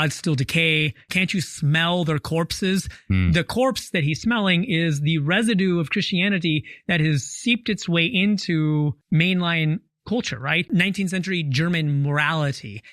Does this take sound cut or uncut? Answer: cut